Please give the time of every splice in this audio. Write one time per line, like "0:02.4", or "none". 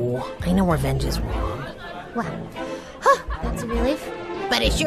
none